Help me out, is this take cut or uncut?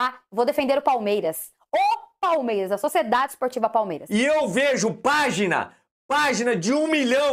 cut